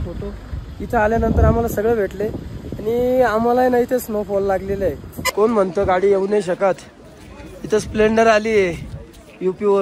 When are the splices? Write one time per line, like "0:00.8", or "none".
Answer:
0:05.1